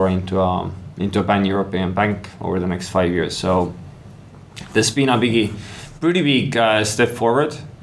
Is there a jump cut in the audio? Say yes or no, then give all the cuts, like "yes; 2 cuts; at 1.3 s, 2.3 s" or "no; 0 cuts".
no; 0 cuts